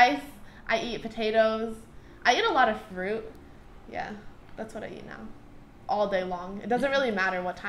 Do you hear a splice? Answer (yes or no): no